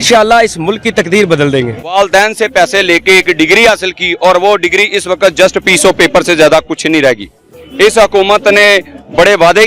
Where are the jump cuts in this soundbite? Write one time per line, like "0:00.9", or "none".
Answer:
0:01.8